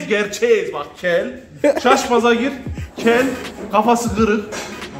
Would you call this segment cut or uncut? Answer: uncut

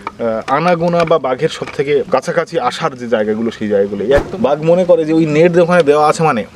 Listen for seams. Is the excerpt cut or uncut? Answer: cut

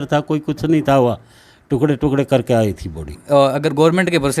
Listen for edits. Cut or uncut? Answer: cut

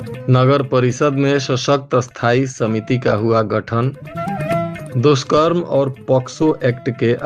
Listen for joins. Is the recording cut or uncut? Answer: uncut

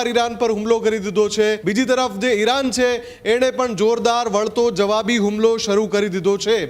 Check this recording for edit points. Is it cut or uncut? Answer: cut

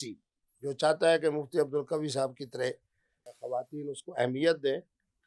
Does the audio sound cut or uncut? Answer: cut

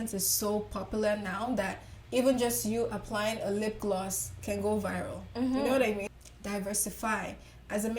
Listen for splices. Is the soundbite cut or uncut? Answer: cut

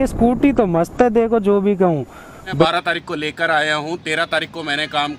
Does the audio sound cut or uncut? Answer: cut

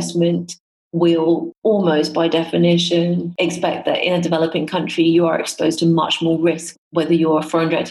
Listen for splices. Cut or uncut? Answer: cut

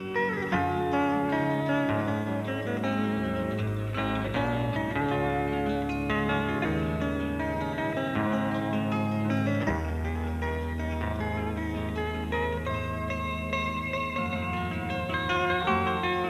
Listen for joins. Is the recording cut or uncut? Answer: uncut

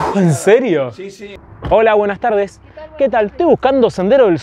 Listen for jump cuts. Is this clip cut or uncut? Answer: cut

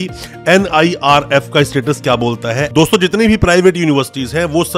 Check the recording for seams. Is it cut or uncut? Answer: cut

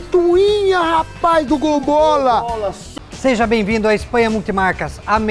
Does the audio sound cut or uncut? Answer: cut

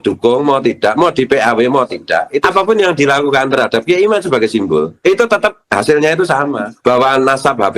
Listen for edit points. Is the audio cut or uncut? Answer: cut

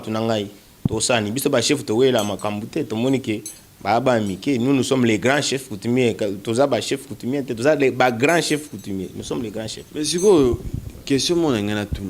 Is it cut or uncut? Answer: uncut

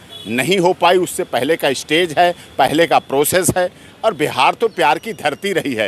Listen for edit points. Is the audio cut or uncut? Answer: uncut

